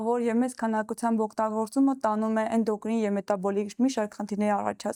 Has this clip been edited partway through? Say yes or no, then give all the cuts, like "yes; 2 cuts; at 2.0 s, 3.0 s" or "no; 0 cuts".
no; 0 cuts